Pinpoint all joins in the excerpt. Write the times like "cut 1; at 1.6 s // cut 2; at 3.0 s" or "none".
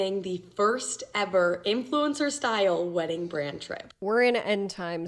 cut 1; at 3.9 s